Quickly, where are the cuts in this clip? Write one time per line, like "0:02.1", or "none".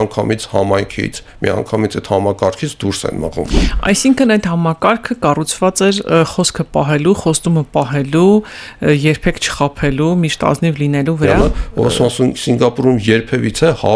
0:03.6
0:11.3